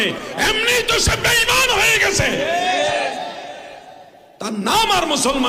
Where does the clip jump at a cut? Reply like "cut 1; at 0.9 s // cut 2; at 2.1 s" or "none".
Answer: none